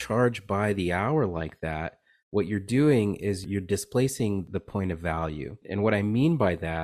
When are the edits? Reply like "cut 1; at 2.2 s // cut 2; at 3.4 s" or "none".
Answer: cut 1; at 3.4 s // cut 2; at 4.5 s // cut 3; at 5.6 s